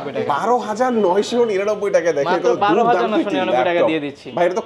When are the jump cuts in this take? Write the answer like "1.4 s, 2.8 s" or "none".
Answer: none